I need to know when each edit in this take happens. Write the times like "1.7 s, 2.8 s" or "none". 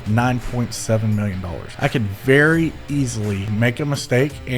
1.6 s, 3.5 s